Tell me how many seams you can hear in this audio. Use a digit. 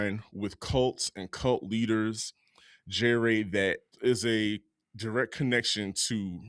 1